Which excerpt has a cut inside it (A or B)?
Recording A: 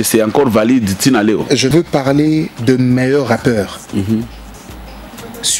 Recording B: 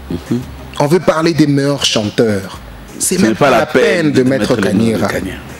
A